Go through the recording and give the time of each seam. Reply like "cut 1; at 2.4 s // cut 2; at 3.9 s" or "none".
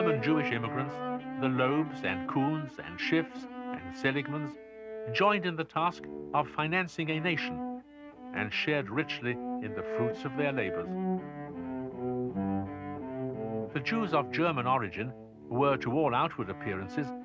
cut 1; at 9.1 s